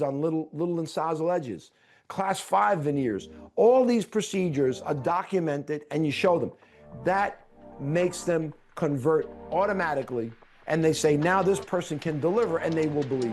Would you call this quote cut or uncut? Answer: uncut